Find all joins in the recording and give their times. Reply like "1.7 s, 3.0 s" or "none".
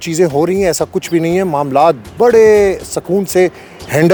none